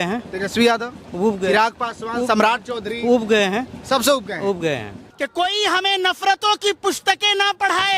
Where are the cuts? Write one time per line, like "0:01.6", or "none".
0:05.1